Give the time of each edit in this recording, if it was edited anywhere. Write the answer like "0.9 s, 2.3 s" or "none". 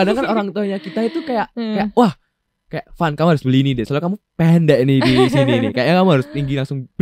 none